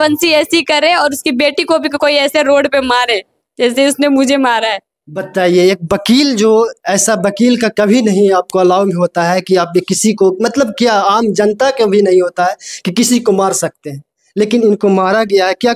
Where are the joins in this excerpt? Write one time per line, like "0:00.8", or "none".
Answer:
none